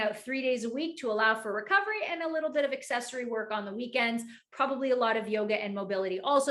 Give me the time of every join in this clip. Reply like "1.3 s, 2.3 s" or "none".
none